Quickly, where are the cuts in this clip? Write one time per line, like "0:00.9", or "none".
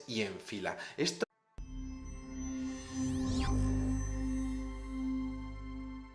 none